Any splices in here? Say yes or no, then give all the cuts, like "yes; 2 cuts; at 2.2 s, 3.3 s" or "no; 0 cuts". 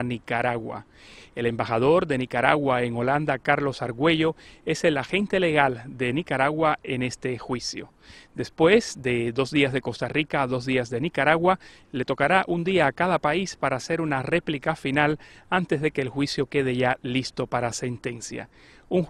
no; 0 cuts